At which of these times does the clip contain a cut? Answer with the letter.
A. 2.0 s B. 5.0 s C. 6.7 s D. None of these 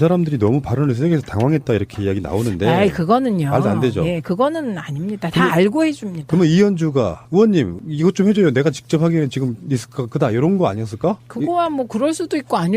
A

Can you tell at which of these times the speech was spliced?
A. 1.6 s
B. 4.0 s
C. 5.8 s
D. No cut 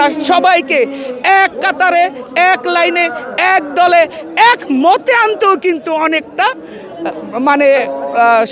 D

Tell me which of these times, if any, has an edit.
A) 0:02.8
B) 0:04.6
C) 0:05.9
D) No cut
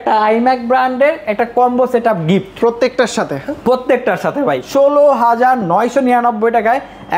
B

